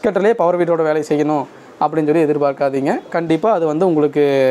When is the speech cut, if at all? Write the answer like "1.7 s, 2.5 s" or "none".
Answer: none